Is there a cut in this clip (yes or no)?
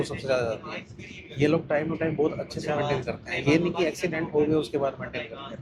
no